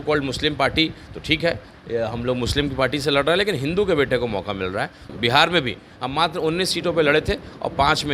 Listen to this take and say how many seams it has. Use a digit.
1